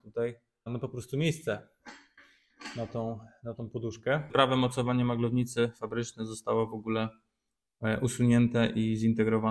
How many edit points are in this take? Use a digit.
1